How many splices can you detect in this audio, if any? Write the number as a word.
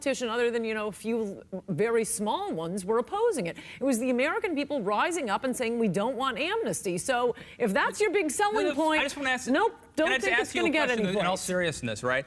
one